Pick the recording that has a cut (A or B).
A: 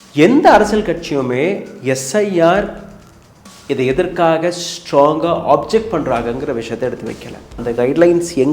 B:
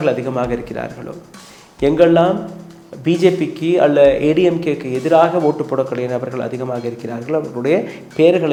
A